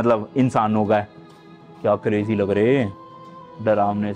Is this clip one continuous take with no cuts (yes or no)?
yes